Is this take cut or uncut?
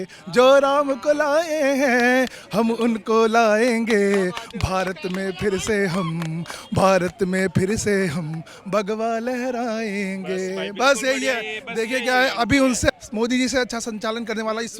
cut